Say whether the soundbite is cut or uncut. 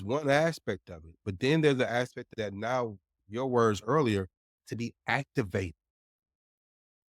cut